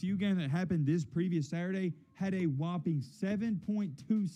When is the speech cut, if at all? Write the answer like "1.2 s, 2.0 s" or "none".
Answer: none